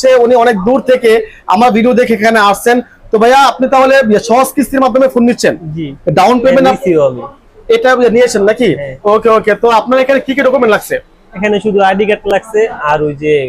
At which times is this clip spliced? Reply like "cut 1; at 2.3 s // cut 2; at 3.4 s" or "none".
none